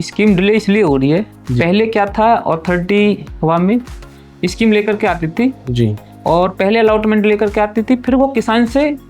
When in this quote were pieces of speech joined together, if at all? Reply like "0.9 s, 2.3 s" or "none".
3.4 s